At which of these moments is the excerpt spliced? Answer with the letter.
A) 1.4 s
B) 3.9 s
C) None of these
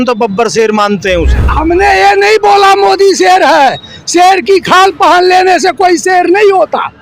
A